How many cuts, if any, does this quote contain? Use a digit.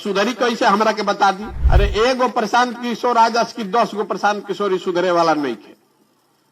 1